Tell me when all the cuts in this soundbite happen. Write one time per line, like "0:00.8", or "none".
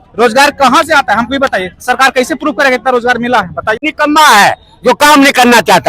0:03.8